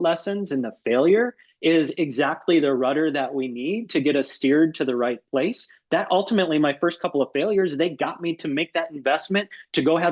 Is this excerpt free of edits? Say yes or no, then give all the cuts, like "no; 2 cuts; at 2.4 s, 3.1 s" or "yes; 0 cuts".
yes; 0 cuts